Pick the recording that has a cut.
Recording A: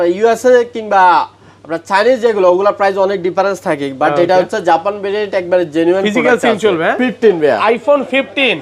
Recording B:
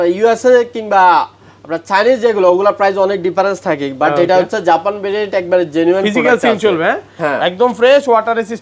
A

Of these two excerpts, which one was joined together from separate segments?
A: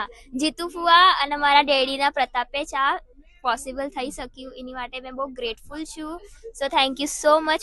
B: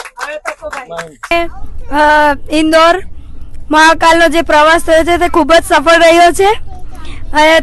B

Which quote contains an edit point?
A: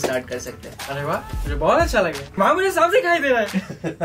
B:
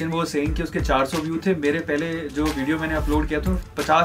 A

